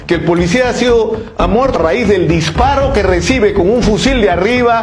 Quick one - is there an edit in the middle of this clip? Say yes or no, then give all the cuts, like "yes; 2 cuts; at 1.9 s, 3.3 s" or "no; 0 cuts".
yes; 1 cut; at 1.7 s